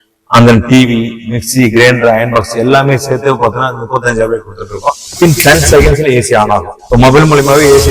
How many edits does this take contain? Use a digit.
2